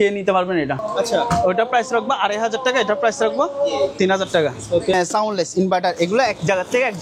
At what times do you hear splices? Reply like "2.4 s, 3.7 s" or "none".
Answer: 0.8 s, 4.9 s

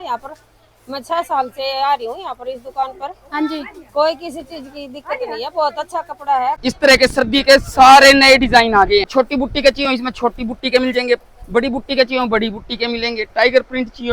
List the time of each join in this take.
6.6 s, 9.1 s

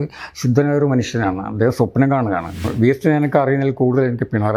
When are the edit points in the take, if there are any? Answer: 2.7 s

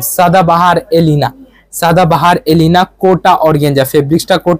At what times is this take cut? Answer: none

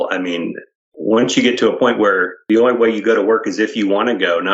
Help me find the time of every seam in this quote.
0.9 s, 2.4 s

